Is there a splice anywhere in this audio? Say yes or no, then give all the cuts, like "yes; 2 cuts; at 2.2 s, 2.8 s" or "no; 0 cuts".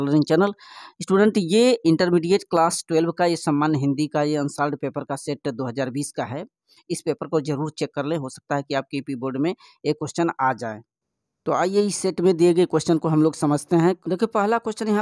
yes; 1 cut; at 14.0 s